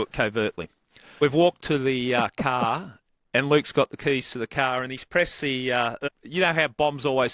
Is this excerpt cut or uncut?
cut